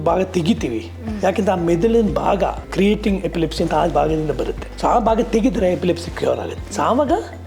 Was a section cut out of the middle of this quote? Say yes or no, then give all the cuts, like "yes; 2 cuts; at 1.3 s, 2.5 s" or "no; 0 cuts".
yes; 2 cuts; at 4.6 s, 6.6 s